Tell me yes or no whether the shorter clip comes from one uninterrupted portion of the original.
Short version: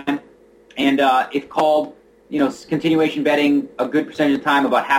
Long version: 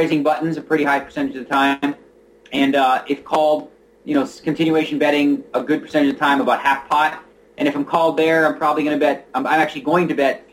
yes